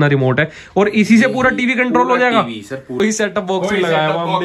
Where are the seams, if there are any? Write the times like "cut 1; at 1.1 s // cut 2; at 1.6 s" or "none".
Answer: cut 1; at 3.0 s